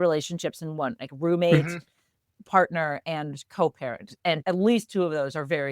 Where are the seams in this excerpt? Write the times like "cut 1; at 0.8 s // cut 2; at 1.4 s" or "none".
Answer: cut 1; at 2.4 s // cut 2; at 4.4 s